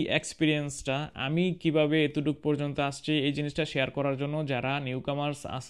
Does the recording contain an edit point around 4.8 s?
no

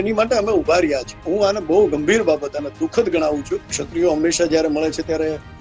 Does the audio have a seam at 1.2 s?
yes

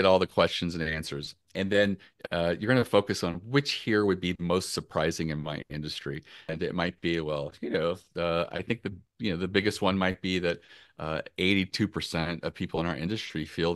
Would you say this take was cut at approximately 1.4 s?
yes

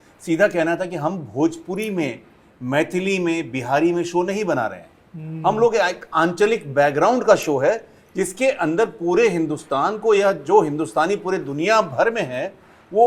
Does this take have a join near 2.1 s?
no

